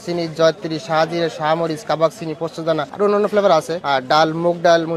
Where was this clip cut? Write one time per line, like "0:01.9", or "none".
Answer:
none